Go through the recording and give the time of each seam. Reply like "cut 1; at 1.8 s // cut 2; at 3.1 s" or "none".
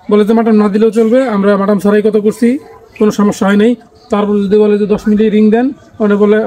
none